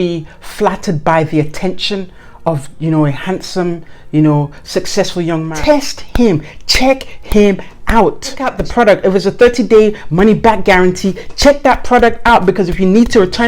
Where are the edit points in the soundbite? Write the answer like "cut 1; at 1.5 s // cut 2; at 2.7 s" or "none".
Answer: cut 1; at 5.5 s // cut 2; at 8.5 s